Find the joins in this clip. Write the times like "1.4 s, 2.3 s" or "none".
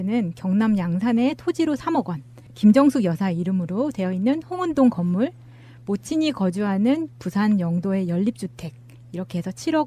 none